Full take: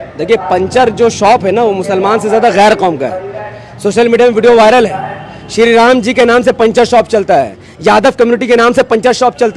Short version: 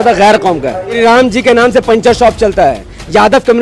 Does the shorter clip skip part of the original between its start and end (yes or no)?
yes